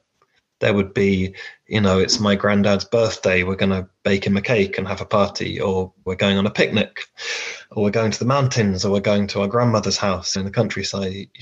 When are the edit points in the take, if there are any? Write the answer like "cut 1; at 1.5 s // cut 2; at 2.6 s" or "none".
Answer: none